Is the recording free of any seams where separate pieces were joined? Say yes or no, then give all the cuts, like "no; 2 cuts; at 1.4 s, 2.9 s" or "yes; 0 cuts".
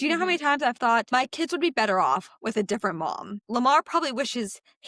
no; 2 cuts; at 1.1 s, 3.4 s